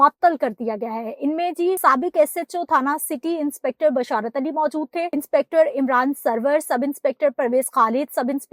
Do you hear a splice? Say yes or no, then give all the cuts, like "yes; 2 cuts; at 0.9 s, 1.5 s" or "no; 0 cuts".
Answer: yes; 2 cuts; at 1.8 s, 5.1 s